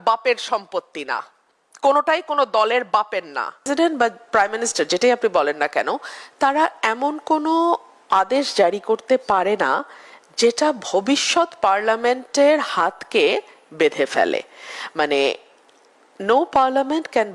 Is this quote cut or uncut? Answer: cut